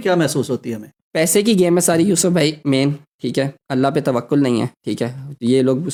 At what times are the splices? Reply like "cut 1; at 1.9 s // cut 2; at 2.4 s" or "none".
none